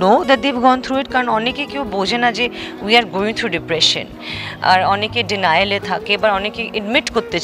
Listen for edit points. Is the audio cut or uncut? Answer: uncut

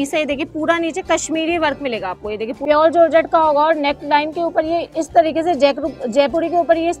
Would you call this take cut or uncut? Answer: cut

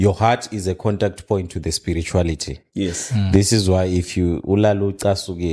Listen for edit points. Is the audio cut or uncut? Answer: uncut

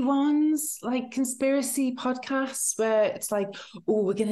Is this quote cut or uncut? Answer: uncut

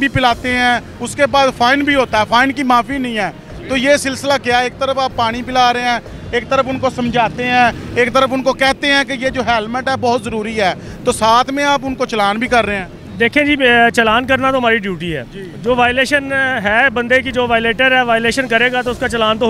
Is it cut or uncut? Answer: uncut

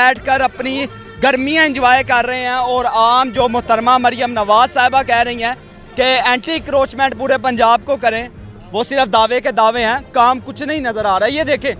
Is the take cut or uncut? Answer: uncut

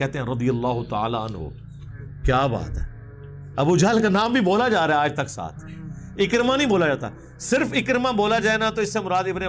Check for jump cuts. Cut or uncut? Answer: uncut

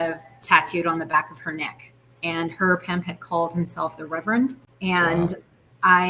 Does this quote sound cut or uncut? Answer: cut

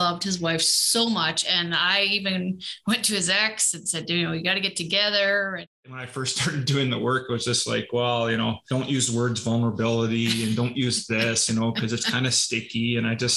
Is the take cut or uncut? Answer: cut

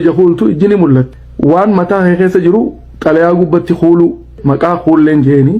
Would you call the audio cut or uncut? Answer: cut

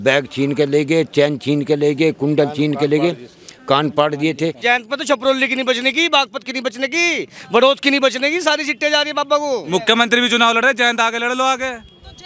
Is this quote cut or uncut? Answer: cut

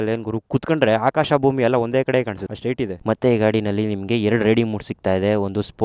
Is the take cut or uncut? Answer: cut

